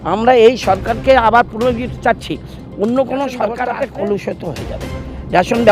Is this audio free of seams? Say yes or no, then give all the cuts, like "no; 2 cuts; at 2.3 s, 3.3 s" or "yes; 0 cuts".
no; 1 cut; at 3.5 s